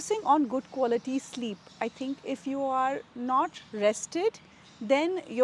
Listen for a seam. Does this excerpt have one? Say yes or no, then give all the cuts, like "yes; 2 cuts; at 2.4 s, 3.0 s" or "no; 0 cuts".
no; 0 cuts